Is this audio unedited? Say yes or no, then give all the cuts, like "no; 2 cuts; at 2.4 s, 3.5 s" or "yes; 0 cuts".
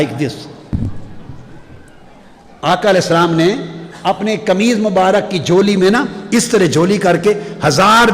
yes; 0 cuts